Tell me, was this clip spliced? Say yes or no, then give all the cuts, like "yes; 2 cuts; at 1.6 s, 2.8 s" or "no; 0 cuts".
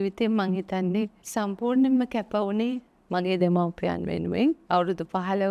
yes; 2 cuts; at 1.2 s, 4.6 s